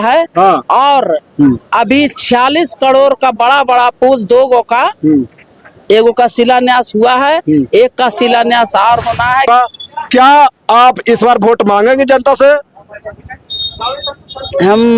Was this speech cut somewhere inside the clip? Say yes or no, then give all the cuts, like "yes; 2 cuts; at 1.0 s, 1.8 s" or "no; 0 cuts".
yes; 1 cut; at 9.5 s